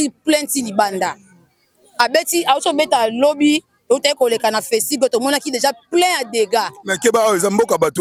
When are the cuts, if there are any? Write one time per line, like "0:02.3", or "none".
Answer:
none